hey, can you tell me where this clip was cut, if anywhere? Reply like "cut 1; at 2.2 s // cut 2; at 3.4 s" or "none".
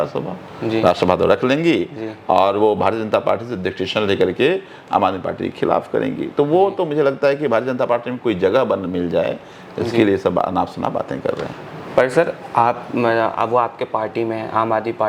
none